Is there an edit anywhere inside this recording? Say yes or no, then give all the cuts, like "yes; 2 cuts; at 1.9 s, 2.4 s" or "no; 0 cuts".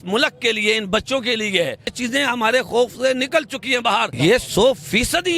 yes; 2 cuts; at 2.0 s, 4.1 s